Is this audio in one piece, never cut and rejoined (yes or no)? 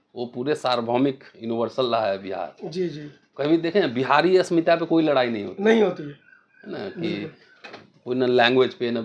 yes